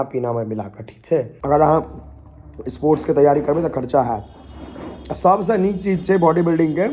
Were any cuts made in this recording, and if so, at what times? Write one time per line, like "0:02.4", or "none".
0:01.3